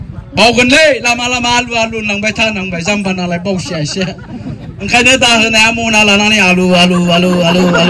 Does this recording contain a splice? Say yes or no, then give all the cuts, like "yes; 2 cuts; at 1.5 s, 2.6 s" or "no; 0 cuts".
no; 0 cuts